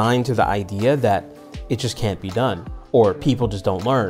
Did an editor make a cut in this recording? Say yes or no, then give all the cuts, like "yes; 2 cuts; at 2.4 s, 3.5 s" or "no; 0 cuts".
no; 0 cuts